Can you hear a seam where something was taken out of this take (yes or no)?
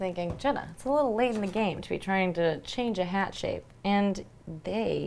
yes